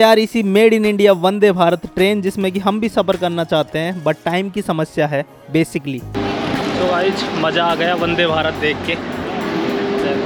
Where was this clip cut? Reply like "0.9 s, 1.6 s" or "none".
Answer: none